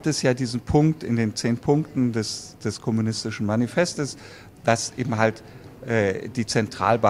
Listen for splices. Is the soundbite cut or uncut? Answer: uncut